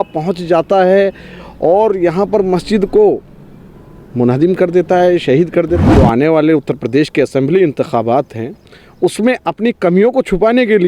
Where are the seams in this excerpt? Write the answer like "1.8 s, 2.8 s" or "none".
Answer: 5.8 s